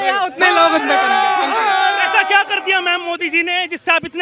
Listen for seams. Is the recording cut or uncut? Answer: uncut